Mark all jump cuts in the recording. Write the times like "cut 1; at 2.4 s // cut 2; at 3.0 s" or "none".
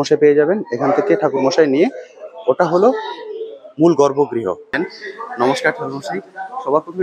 cut 1; at 4.7 s

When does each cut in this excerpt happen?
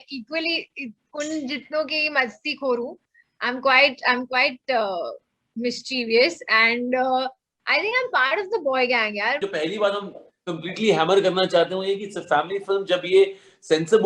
cut 1; at 9.4 s

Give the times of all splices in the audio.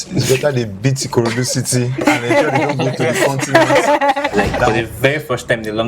cut 1; at 4.7 s

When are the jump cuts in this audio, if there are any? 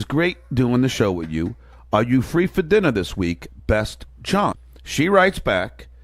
cut 1; at 4.7 s

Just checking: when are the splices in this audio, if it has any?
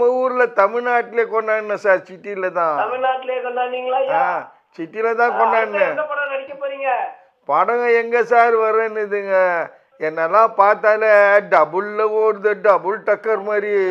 none

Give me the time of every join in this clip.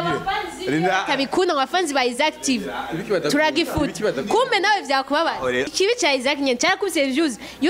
cut 1; at 5.7 s

